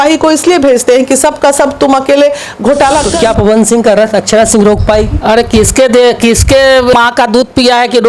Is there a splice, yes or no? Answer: yes